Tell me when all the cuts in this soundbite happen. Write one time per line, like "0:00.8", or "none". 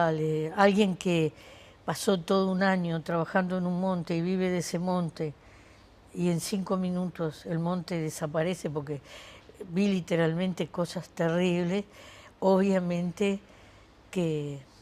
none